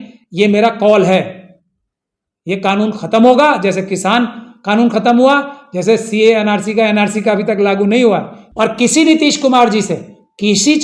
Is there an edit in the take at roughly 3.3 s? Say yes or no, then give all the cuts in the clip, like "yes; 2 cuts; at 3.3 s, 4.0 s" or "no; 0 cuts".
no; 1 cut; at 8.4 s